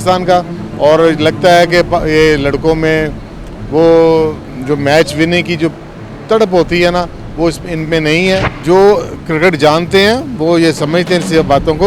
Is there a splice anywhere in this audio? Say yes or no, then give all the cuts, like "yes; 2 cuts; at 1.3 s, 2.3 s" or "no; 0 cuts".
yes; 1 cut; at 8.5 s